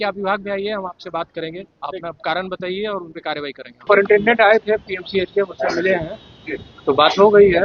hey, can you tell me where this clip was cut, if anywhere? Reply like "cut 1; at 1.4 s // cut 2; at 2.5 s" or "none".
cut 1; at 3.7 s